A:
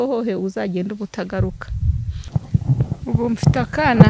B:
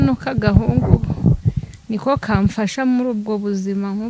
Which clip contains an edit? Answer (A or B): A